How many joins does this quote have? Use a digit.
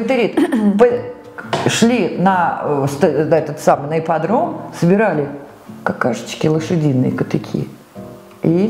0